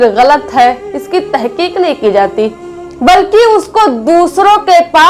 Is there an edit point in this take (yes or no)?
no